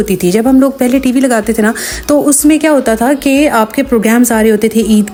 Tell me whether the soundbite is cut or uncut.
uncut